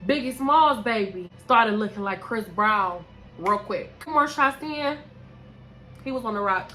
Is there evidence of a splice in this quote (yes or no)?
yes